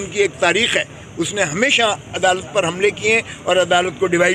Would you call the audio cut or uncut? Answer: uncut